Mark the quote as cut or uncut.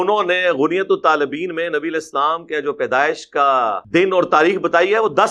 cut